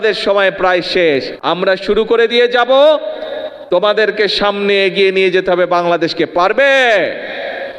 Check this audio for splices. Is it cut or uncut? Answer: cut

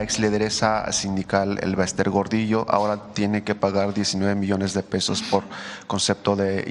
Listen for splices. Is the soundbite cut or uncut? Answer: uncut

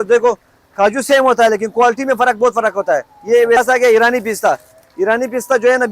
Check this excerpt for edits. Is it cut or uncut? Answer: cut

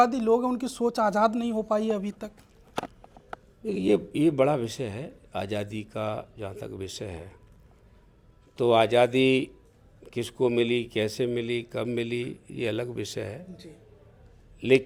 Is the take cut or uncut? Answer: uncut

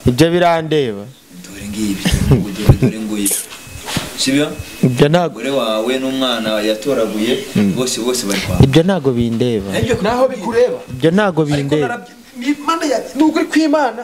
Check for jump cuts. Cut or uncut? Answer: uncut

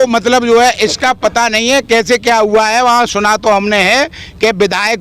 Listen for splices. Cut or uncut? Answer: uncut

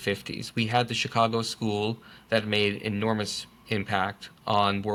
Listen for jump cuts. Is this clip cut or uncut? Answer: uncut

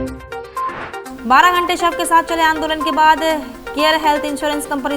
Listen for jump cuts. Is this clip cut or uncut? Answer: cut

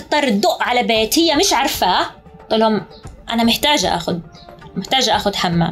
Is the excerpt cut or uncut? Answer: uncut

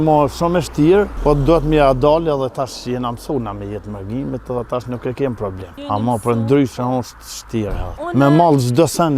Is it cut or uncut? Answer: cut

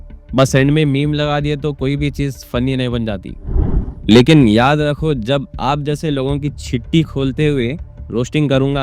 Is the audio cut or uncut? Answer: cut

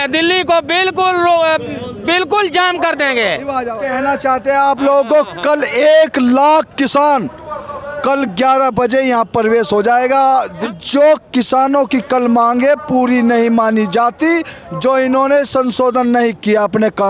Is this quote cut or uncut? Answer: cut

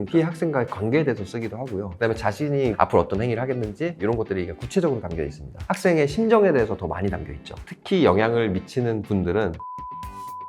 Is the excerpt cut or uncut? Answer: cut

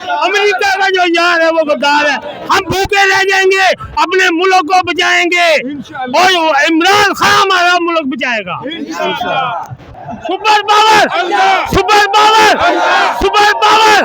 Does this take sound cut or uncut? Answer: uncut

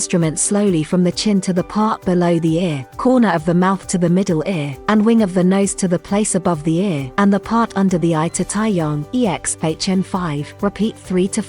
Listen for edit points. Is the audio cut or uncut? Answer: cut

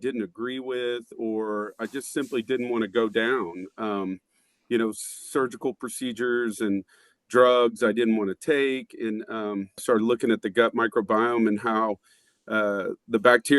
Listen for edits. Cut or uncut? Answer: cut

